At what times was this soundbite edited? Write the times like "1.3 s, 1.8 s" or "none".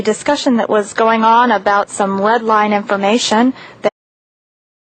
none